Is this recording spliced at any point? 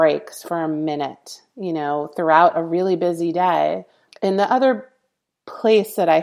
yes; 1 cut; at 4.0 s

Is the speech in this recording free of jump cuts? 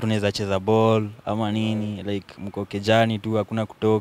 yes; 0 cuts

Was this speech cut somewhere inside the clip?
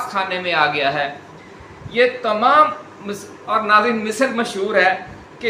no; 0 cuts

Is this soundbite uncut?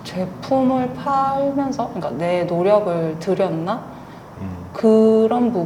yes; 0 cuts

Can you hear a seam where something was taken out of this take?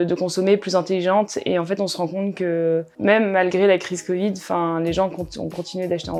no; 0 cuts

